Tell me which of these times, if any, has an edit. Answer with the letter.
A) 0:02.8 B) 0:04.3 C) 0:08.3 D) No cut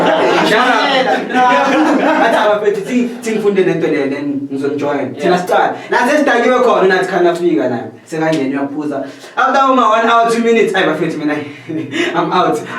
D